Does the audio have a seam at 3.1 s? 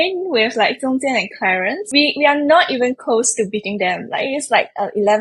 no; 1 cut; at 1.8 s

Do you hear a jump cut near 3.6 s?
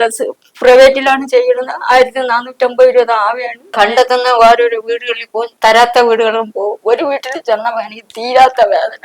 yes; 1 cut; at 3.6 s

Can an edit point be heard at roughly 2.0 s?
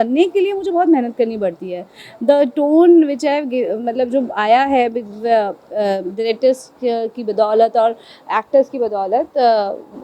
no; 0 cuts

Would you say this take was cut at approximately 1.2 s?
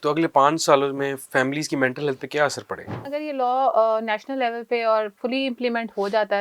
no; 1 cut; at 3.0 s

